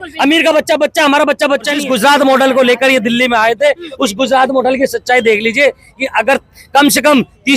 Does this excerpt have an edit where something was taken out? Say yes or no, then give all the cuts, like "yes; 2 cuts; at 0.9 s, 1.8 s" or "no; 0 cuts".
yes; 1 cut; at 1.8 s